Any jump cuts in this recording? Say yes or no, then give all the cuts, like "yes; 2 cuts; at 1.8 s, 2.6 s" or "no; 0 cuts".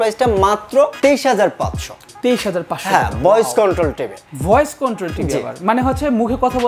no; 0 cuts